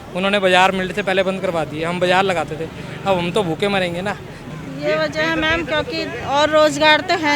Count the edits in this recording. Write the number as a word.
one